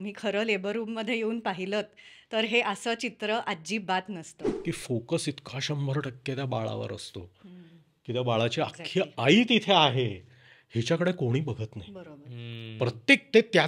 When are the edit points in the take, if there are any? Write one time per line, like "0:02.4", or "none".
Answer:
0:04.5